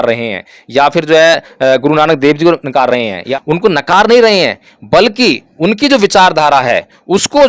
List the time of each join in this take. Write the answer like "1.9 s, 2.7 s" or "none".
3.3 s

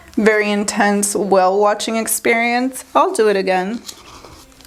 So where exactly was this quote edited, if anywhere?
none

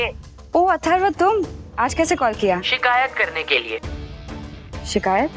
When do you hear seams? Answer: 1.6 s, 2.7 s

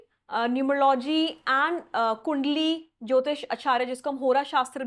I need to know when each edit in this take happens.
none

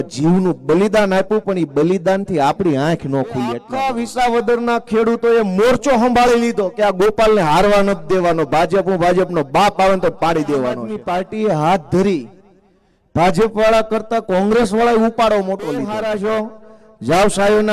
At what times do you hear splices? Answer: 3.7 s, 10.9 s, 15.9 s

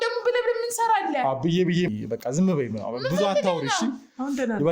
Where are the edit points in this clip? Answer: 1.9 s

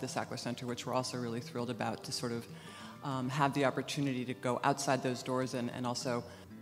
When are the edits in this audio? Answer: 3.8 s

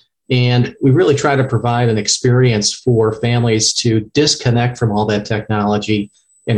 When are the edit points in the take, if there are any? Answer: none

